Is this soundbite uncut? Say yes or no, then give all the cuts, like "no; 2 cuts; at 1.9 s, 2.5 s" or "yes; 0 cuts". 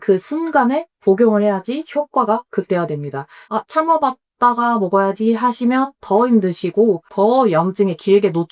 yes; 0 cuts